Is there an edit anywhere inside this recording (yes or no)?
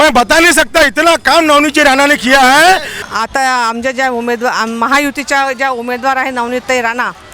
yes